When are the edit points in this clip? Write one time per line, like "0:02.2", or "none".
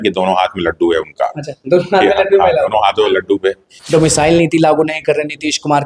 0:03.8